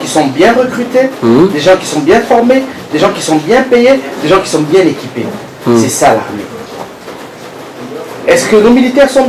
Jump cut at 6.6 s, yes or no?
no